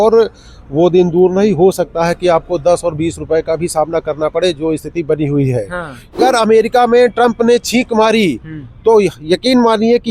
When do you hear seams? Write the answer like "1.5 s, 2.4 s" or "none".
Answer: 6.2 s